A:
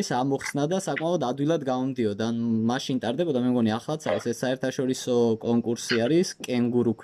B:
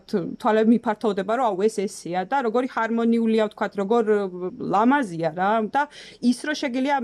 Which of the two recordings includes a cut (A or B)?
B